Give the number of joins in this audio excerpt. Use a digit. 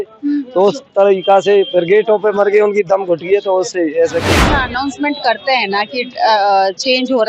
1